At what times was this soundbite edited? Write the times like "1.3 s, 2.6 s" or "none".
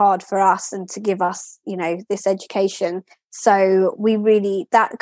none